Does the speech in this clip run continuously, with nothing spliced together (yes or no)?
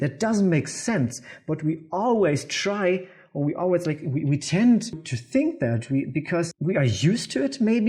no